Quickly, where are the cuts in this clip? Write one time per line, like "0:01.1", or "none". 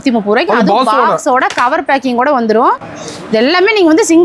0:02.8